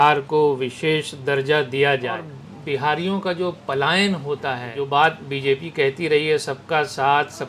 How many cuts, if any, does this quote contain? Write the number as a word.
one